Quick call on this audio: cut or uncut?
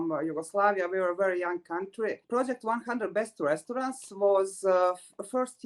cut